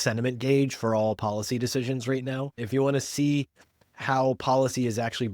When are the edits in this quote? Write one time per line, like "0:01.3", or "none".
0:02.6